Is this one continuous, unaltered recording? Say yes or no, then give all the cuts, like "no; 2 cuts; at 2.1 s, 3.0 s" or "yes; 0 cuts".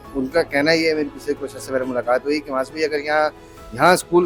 yes; 0 cuts